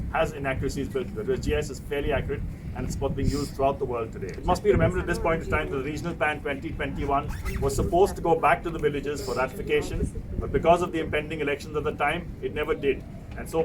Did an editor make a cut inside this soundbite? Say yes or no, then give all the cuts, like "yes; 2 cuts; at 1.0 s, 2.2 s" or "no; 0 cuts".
no; 0 cuts